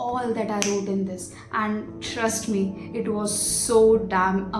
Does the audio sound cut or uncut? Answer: uncut